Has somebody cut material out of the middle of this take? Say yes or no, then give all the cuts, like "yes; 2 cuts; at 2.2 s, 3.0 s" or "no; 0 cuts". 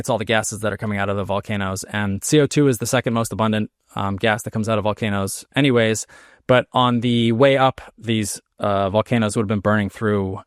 no; 0 cuts